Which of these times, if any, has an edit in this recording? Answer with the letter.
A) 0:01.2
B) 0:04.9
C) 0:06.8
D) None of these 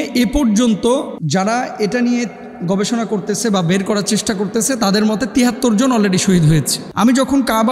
C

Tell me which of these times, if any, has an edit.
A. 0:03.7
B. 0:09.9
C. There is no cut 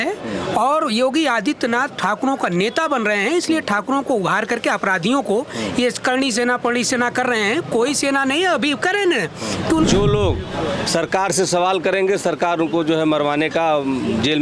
B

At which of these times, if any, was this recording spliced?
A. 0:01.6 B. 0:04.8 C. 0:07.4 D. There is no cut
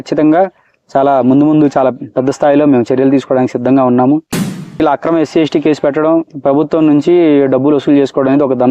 B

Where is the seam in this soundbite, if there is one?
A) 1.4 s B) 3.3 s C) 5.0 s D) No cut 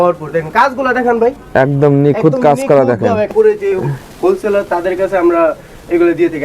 B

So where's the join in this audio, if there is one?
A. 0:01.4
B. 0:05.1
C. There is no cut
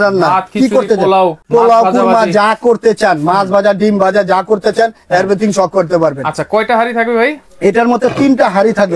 A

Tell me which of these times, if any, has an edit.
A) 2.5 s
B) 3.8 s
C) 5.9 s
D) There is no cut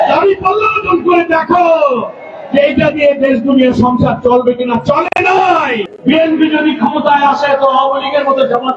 C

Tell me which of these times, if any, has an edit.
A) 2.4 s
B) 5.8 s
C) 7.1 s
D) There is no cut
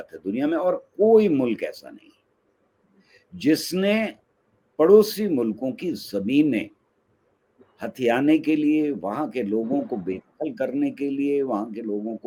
D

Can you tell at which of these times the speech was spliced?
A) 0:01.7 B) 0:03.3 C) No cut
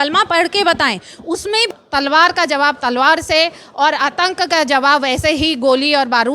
A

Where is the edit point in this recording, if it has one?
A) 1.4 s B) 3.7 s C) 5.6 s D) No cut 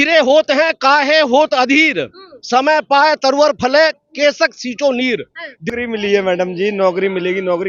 C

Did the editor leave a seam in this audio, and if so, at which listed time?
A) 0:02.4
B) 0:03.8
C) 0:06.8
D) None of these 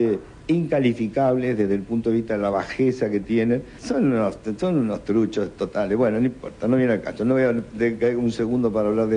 B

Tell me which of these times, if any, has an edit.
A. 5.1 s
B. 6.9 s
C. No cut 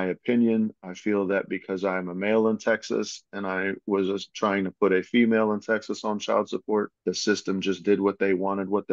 B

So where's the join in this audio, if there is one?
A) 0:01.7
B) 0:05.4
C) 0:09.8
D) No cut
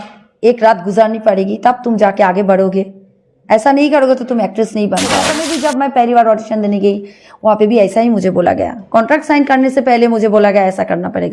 B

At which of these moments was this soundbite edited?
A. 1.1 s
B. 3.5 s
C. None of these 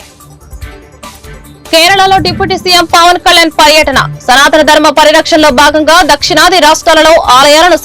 C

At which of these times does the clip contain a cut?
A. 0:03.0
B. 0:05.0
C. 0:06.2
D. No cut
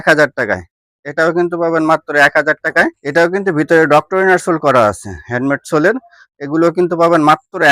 A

